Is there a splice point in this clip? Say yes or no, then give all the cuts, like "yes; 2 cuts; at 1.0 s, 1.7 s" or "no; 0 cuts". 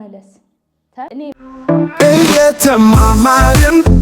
yes; 1 cut; at 1.3 s